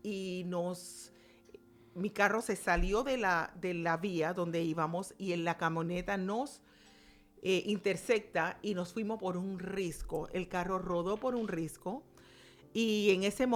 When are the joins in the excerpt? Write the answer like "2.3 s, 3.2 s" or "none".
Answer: none